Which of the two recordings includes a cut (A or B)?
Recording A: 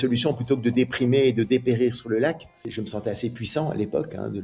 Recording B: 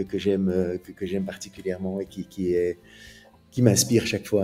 A